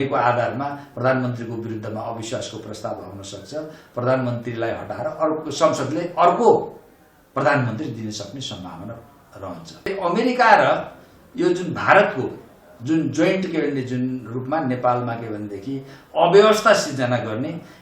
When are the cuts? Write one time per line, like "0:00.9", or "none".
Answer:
0:09.9